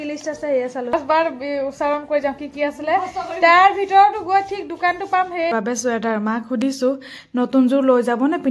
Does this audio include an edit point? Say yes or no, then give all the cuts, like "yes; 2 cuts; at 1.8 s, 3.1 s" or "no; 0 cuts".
yes; 2 cuts; at 0.9 s, 5.5 s